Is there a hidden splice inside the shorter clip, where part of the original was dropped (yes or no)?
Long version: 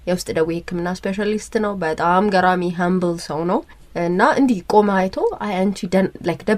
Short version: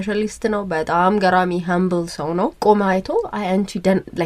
yes